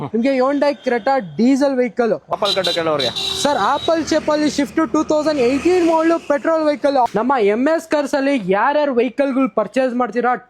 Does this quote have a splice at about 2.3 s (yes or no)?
yes